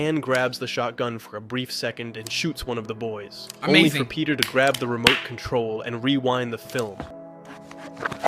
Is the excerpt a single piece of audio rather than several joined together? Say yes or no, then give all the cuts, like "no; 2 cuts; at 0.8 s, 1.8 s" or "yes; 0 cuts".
no; 1 cut; at 7.2 s